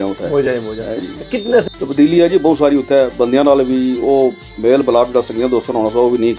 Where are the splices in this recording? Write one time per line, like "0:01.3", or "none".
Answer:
0:01.6